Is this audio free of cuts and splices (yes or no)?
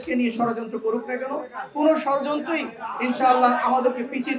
yes